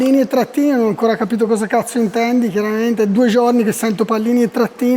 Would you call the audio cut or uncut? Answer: uncut